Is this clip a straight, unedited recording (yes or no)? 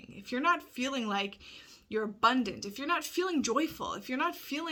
yes